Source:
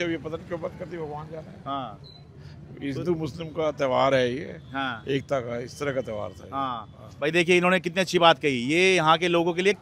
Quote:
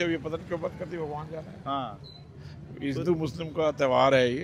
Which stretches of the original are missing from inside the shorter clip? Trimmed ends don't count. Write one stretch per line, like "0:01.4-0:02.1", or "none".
none